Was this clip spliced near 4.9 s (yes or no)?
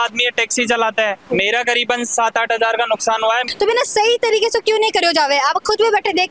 no